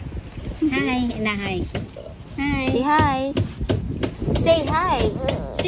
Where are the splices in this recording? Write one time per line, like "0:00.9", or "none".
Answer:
none